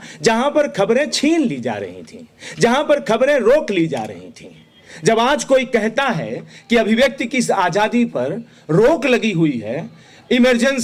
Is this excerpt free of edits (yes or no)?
yes